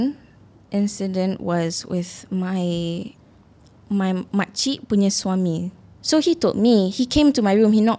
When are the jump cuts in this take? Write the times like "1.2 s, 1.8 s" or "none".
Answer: 5.7 s